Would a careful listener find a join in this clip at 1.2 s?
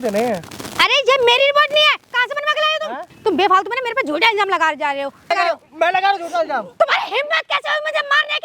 no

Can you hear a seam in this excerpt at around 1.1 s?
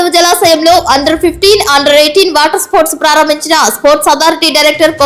no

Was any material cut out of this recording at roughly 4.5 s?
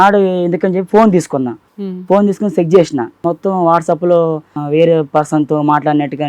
yes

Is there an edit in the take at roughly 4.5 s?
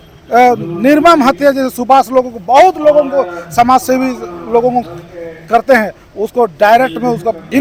no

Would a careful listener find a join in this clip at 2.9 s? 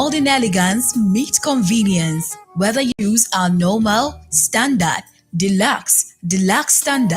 yes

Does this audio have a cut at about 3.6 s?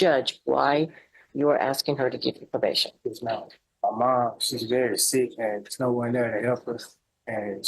yes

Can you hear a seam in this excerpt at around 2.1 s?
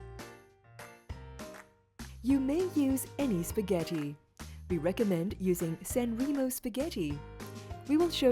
yes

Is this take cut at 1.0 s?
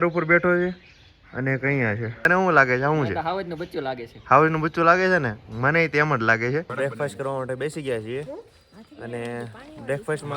no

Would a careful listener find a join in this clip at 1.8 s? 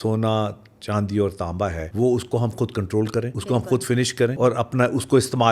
yes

